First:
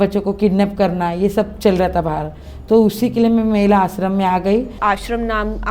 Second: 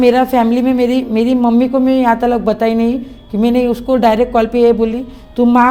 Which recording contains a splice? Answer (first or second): first